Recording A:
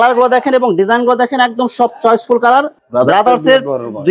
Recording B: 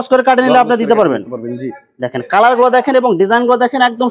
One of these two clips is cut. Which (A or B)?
A